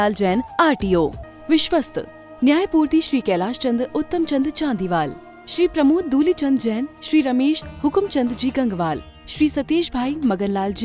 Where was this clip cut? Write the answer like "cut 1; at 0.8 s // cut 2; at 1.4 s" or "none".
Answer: cut 1; at 1.2 s